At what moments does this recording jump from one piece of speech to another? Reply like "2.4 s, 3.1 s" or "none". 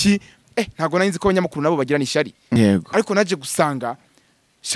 2.5 s

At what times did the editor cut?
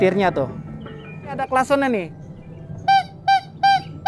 1.4 s

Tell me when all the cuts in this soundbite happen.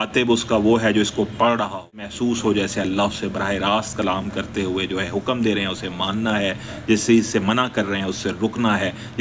2.1 s

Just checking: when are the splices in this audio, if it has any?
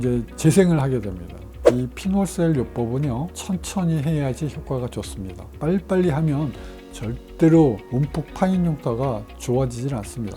1.6 s, 3.3 s

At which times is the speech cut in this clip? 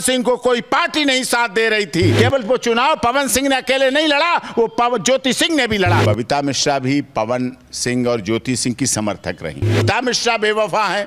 2.1 s, 6.0 s, 9.8 s

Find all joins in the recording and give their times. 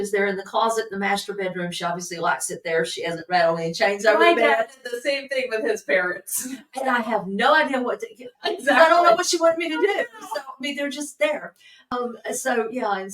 11.9 s

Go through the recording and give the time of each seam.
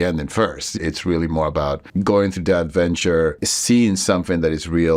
0.7 s, 1.8 s, 3.5 s

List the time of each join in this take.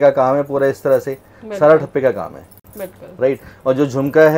none

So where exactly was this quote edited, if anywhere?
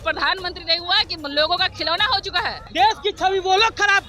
2.6 s

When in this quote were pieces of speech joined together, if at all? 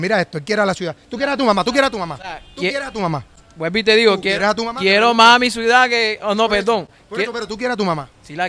none

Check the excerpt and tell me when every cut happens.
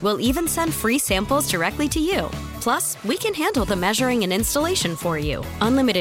none

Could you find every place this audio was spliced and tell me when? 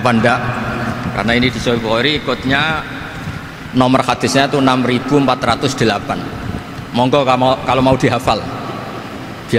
none

